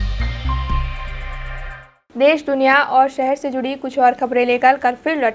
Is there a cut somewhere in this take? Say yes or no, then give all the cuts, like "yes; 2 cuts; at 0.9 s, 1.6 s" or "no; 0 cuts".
no; 0 cuts